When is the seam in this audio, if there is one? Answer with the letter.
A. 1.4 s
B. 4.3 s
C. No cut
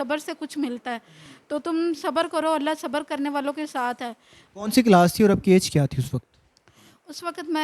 C